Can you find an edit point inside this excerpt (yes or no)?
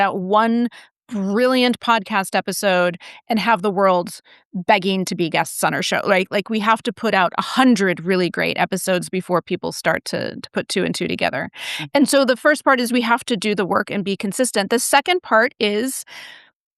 no